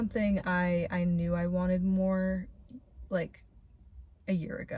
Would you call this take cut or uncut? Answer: uncut